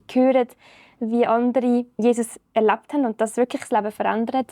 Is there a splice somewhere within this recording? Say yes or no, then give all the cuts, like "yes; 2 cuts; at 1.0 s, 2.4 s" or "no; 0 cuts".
yes; 1 cut; at 2.0 s